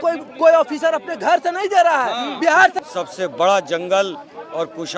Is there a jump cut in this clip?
yes; 1 cut; at 2.8 s

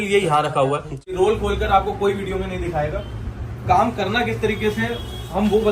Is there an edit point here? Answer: yes; 1 cut; at 1.2 s

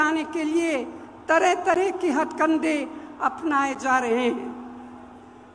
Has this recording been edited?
no; 0 cuts

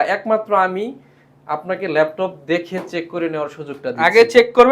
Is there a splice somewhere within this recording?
no; 0 cuts

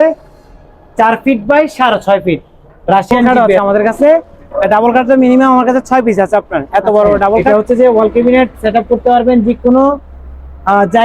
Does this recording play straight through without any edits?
no; 2 cuts; at 3.3 s, 7.4 s

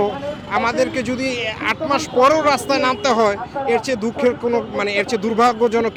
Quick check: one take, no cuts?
yes; 0 cuts

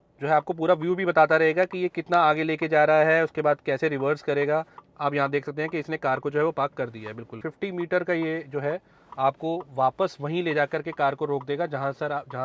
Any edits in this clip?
yes; 2 cuts; at 4.8 s, 7.4 s

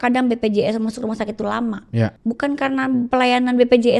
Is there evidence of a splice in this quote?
yes; 1 cut; at 2.2 s

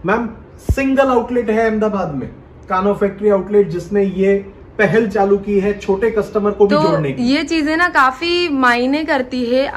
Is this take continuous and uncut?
yes; 0 cuts

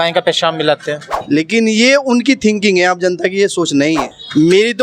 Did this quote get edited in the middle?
yes; 1 cut; at 1.1 s

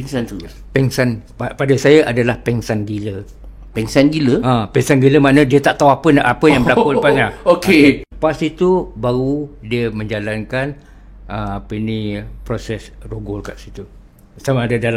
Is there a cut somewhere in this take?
yes; 1 cut; at 8.1 s

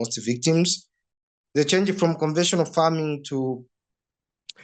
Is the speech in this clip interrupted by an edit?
yes; 1 cut; at 1.0 s

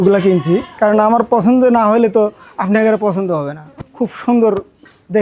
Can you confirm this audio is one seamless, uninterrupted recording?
yes; 0 cuts

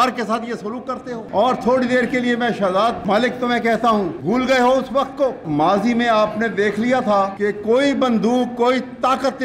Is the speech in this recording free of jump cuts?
no; 5 cuts; at 1.2 s, 3.0 s, 4.2 s, 5.4 s, 7.3 s

